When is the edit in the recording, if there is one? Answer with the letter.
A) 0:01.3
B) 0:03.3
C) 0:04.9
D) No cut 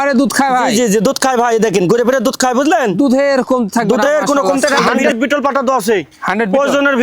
C